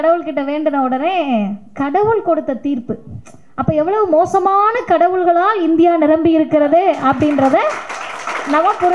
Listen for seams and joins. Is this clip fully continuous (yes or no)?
yes